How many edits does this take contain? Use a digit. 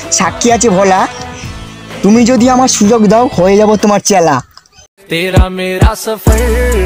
0